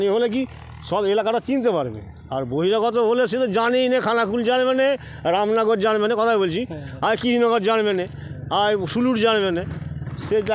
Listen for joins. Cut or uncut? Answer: uncut